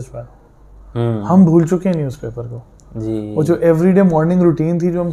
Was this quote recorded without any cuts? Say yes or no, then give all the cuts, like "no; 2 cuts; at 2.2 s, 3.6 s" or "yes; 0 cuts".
yes; 0 cuts